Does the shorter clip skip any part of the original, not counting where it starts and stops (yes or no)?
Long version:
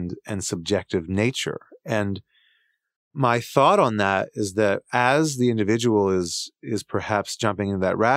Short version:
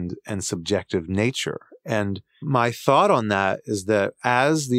yes